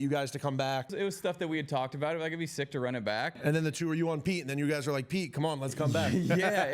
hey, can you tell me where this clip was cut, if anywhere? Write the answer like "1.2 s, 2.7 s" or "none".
0.9 s, 3.4 s